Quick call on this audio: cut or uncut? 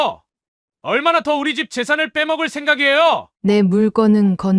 cut